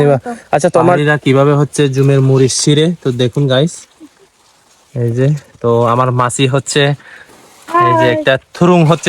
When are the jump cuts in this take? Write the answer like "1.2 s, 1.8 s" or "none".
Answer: 1.0 s